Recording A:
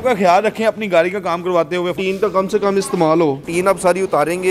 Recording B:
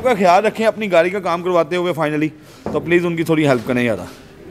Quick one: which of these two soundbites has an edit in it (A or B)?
A